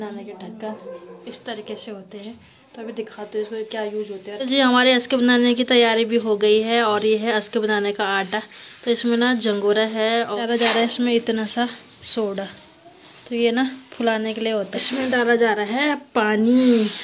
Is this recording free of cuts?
no; 3 cuts; at 4.4 s, 10.3 s, 14.8 s

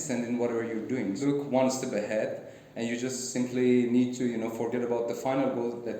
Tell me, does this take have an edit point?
yes; 1 cut; at 1.2 s

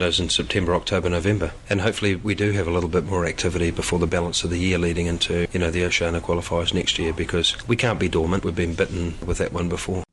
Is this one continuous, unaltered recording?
no; 5 cuts; at 1.5 s, 5.5 s, 7.5 s, 8.4 s, 9.2 s

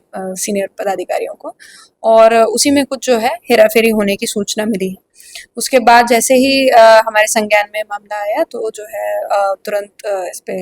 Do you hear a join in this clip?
no; 0 cuts

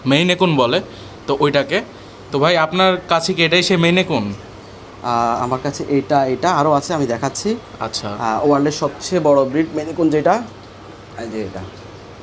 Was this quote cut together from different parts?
no; 0 cuts

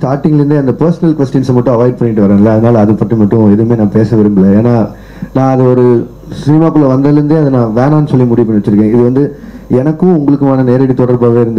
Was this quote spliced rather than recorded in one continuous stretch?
no; 0 cuts

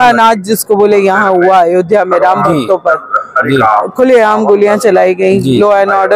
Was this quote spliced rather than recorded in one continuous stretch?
no; 0 cuts

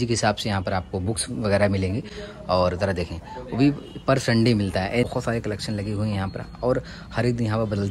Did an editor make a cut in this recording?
no; 0 cuts

